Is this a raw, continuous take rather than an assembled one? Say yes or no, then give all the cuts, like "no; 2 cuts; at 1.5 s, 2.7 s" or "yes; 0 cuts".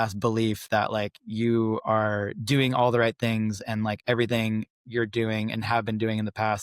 yes; 0 cuts